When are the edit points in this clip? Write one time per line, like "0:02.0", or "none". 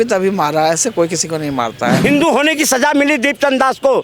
0:02.0